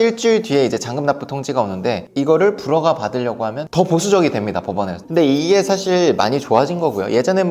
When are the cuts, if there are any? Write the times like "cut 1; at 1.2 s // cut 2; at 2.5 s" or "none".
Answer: cut 1; at 2.1 s // cut 2; at 3.6 s // cut 3; at 5.0 s